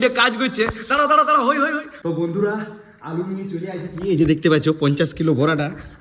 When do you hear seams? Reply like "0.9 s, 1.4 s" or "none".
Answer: 2.0 s